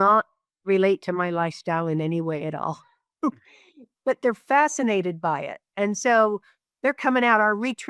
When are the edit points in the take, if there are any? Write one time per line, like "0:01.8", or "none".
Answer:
none